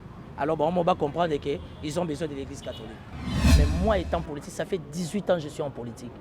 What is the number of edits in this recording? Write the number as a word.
one